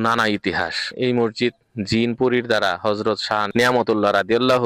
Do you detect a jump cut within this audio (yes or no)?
yes